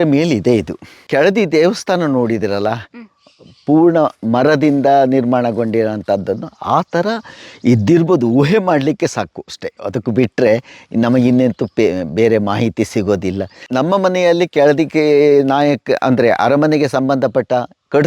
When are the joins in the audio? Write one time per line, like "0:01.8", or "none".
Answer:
0:01.0
0:13.6